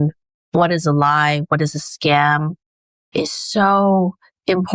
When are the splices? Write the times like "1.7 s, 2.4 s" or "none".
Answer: none